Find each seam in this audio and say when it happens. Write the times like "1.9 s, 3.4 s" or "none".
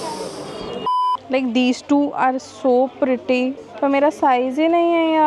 1.2 s, 3.6 s